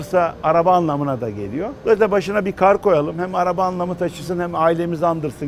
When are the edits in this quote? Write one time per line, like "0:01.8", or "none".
none